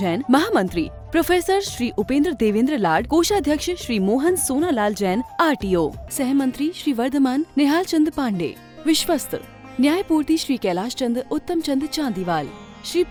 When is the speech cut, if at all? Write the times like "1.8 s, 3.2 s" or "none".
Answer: none

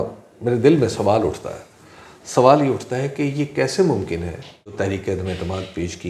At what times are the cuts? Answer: 4.7 s

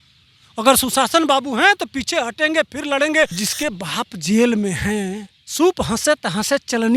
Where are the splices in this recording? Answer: 3.4 s

